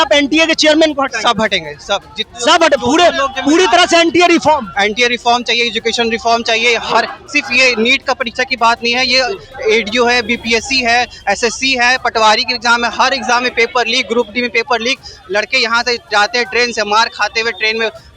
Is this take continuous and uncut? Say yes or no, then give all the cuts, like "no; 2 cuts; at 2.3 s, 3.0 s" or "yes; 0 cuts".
yes; 0 cuts